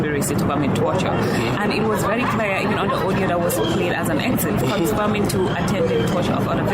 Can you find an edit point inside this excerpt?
yes; 1 cut; at 4.6 s

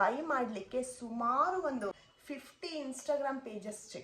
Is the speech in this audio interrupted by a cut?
yes; 1 cut; at 1.9 s

